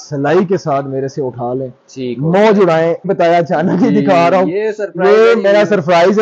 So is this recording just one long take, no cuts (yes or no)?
no